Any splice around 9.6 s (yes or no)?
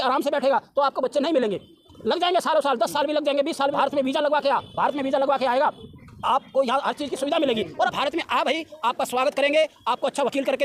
no